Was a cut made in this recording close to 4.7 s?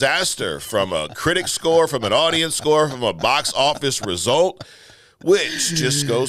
no; 0 cuts

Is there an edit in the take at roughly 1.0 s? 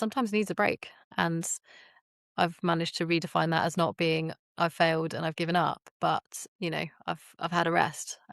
yes; 1 cut; at 1.0 s

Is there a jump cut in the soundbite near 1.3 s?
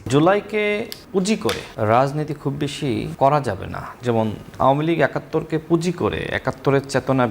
yes; 2 cuts; at 1.3 s, 3.1 s

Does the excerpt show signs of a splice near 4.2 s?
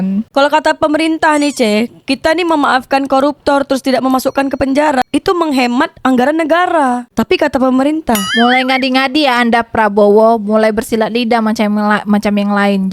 no; 1 cut; at 8.3 s

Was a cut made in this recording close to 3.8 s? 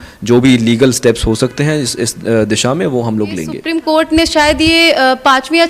yes; 1 cut; at 3.8 s

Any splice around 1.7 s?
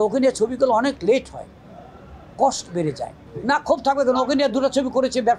no; 1 cut; at 3.3 s

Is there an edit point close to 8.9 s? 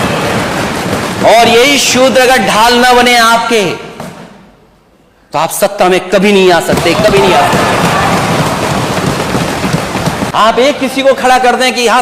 no; 1 cut; at 10.3 s

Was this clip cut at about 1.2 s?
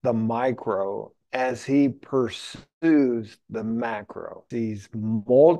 no; 1 cut; at 4.4 s

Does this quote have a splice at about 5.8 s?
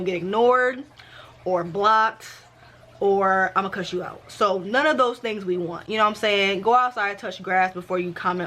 no; 0 cuts

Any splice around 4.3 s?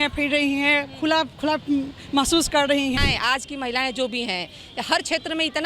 no; 1 cut; at 3.0 s

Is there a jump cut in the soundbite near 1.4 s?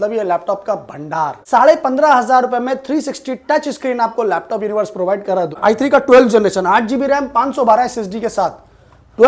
yes; 2 cuts; at 1.4 s, 5.6 s

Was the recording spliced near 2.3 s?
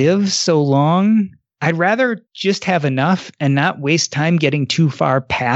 yes; 2 cuts; at 1.4 s, 2.3 s

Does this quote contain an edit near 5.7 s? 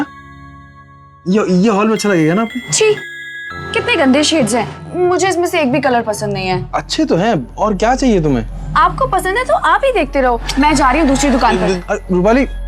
no; 1 cut; at 11.8 s

